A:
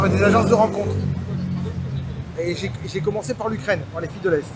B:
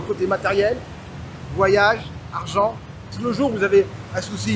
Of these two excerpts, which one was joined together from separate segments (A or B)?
B